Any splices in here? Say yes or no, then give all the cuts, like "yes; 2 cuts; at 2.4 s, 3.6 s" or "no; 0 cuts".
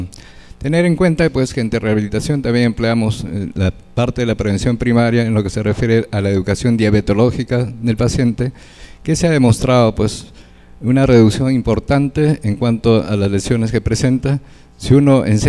no; 0 cuts